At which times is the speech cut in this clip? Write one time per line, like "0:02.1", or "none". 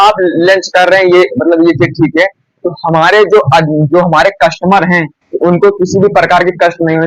none